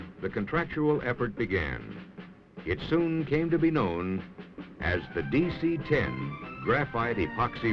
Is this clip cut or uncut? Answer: cut